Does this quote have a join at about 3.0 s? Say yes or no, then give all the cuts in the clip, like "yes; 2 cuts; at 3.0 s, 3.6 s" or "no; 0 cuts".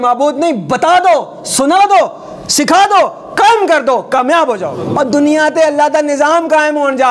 no; 1 cut; at 4.8 s